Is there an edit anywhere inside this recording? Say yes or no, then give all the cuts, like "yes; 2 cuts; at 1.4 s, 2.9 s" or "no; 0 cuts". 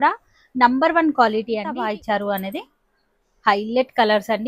yes; 1 cut; at 1.8 s